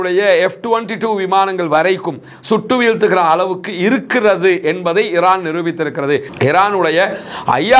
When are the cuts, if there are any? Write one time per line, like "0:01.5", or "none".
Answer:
none